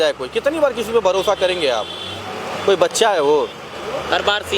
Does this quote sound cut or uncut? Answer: uncut